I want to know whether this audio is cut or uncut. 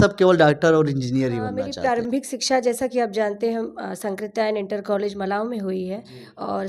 cut